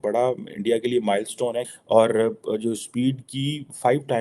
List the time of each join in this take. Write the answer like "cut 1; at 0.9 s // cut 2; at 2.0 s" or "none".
cut 1; at 1.7 s